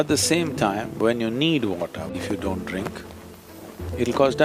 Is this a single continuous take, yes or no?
no